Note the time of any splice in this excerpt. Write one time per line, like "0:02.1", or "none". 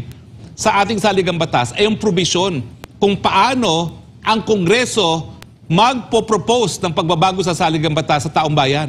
none